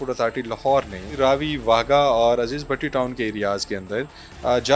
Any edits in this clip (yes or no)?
yes